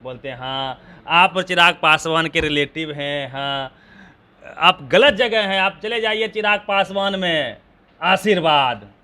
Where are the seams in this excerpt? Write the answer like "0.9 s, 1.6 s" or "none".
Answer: none